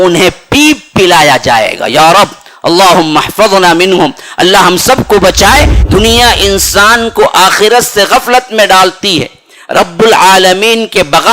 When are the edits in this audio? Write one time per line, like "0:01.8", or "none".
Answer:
0:05.8